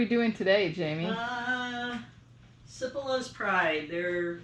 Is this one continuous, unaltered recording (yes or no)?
yes